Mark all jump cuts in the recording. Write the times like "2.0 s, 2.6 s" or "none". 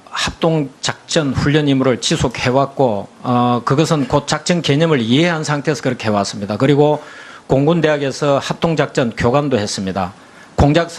5.4 s